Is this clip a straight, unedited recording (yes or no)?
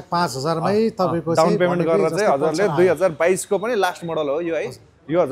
yes